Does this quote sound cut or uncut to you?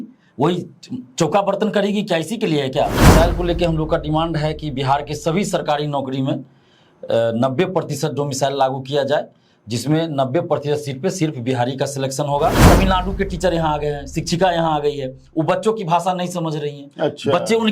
cut